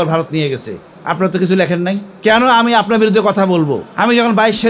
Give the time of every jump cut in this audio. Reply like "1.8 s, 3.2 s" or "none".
2.1 s, 3.8 s